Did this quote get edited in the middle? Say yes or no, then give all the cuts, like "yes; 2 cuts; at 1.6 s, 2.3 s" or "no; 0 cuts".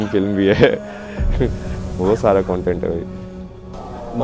no; 0 cuts